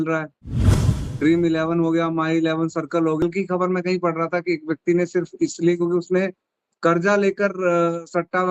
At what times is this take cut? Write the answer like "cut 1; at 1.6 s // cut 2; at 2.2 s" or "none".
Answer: cut 1; at 3.2 s